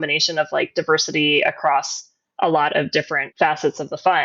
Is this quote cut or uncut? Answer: cut